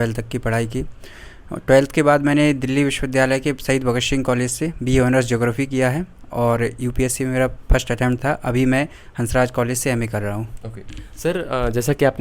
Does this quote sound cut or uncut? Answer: uncut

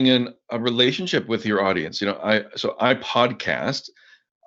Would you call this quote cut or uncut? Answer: uncut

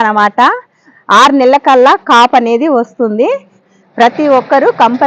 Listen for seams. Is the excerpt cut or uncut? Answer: uncut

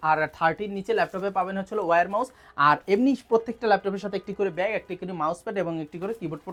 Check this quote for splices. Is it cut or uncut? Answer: uncut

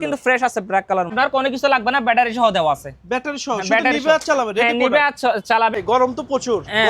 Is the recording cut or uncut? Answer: cut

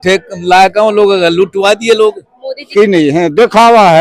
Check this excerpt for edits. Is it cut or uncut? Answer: cut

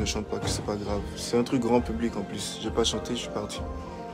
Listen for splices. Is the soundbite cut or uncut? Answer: uncut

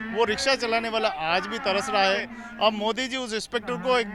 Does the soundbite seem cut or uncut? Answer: cut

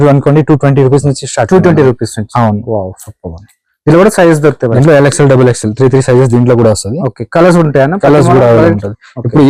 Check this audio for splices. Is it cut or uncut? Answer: uncut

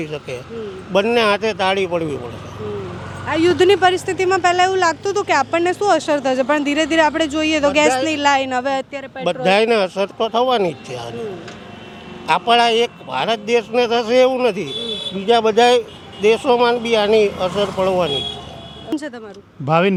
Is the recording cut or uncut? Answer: uncut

